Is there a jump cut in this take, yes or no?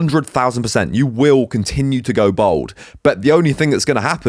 no